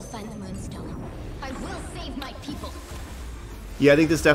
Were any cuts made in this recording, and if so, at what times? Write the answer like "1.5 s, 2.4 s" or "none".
none